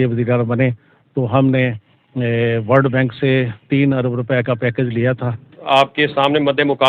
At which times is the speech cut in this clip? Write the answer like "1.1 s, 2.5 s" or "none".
5.6 s